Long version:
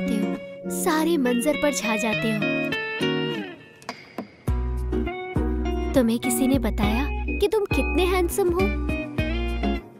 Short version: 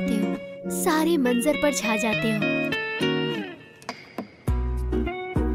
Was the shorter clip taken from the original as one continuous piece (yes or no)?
yes